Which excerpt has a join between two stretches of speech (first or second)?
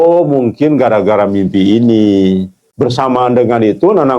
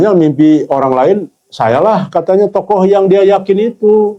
first